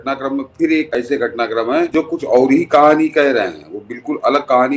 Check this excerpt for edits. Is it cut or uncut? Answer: cut